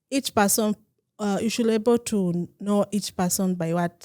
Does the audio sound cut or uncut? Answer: uncut